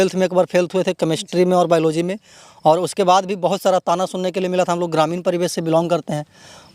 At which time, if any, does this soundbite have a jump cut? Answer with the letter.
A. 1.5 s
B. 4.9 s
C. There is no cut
C